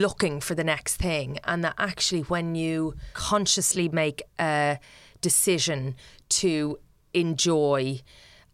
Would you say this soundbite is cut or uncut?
cut